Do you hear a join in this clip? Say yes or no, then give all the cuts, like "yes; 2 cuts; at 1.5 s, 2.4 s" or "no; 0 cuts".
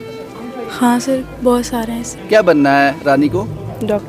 yes; 1 cut; at 2.4 s